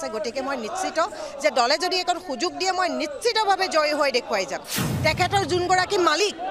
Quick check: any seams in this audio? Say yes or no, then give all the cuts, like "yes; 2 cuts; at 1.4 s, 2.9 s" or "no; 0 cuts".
yes; 1 cut; at 4.8 s